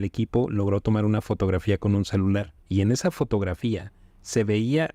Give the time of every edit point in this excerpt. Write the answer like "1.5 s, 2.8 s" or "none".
2.6 s